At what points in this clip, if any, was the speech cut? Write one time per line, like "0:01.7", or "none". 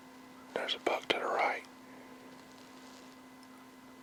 none